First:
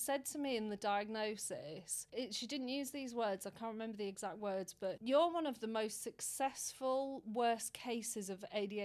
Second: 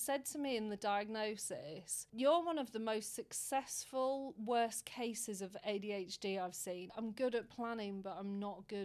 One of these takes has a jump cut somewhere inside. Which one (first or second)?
second